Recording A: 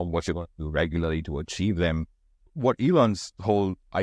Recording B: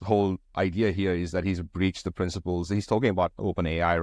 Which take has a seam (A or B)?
A